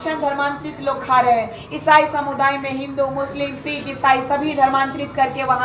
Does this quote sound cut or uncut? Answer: uncut